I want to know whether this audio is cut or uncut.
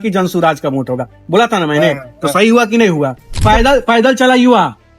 cut